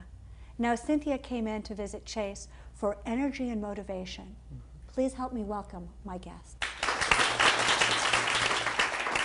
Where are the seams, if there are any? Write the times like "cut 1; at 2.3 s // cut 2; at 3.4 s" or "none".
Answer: none